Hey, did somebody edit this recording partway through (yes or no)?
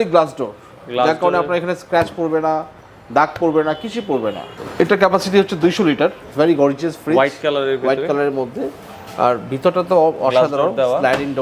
yes